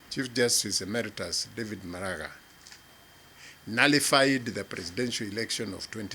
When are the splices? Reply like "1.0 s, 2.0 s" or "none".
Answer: none